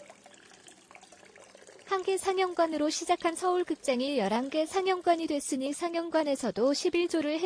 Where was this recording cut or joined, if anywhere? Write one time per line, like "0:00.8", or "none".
0:01.9